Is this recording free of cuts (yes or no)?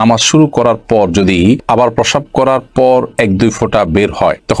yes